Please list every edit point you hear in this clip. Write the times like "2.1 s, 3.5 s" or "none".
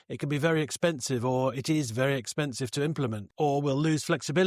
3.2 s